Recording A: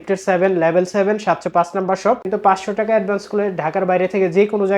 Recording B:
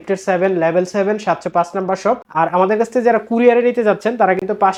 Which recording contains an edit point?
A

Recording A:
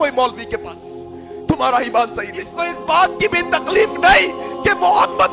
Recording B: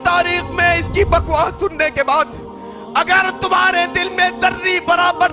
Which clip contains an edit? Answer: A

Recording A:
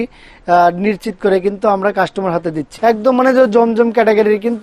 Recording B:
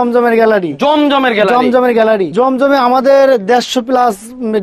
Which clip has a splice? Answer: A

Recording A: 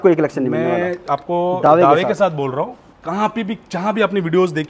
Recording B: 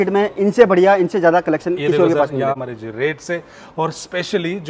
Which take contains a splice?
B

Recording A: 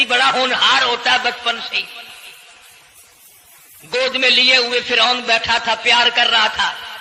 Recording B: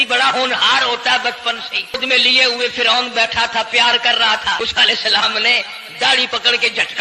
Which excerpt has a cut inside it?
B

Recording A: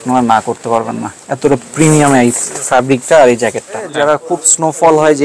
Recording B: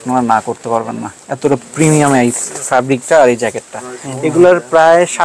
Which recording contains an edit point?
A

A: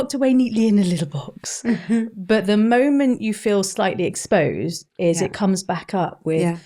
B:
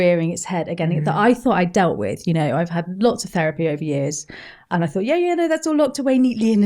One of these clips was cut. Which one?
B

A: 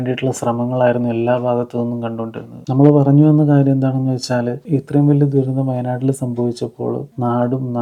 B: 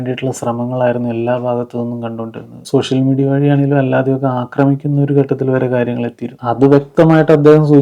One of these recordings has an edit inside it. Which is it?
B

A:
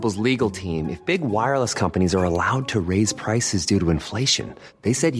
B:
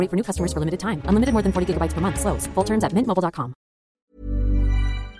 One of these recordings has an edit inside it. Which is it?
B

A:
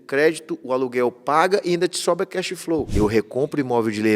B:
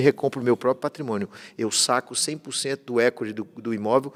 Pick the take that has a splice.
A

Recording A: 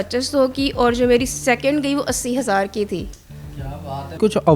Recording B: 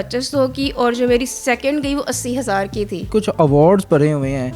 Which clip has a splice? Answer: B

